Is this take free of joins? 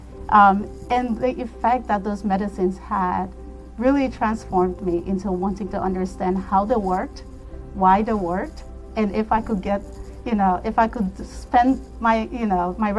yes; 0 cuts

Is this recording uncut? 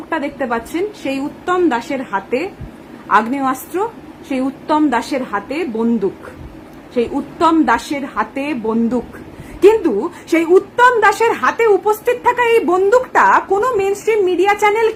yes; 0 cuts

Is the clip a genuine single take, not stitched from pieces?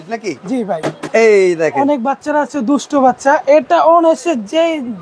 no; 1 cut; at 1.0 s

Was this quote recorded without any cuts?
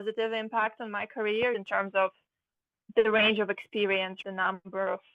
no; 2 cuts; at 1.5 s, 4.2 s

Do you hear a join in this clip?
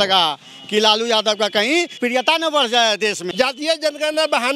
yes; 2 cuts; at 2.0 s, 3.3 s

